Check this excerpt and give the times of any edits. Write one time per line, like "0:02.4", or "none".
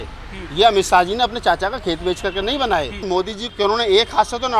0:03.3